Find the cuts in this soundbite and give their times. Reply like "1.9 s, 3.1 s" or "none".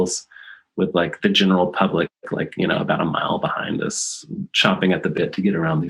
1.2 s, 4.5 s